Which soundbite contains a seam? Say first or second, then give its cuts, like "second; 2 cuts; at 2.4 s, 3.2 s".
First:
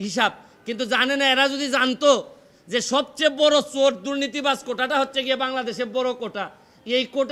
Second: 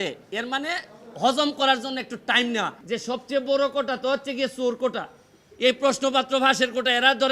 second; 1 cut; at 2.8 s